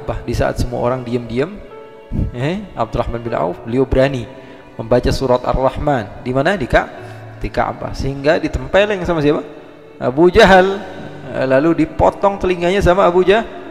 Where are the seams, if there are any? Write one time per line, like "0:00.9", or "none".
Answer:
none